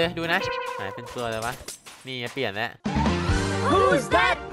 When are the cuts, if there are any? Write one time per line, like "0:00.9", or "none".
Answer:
none